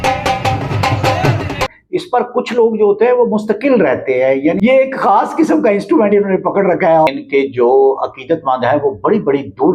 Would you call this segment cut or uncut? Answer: cut